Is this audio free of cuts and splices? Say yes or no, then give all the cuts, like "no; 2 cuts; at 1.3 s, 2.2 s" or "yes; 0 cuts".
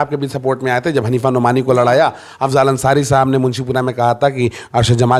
yes; 0 cuts